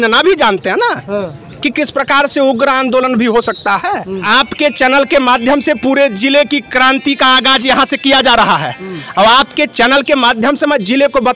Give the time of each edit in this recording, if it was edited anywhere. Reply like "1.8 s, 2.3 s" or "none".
4.2 s